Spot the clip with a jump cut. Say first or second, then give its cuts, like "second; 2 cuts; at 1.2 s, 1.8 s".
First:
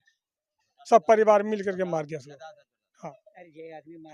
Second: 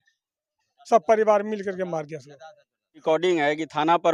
second; 1 cut; at 3.0 s